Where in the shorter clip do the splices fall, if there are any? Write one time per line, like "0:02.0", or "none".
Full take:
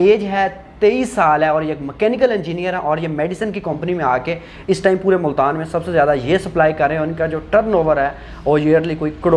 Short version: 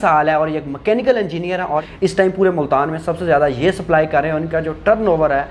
0:01.9